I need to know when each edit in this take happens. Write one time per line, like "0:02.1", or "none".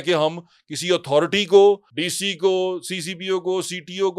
0:01.9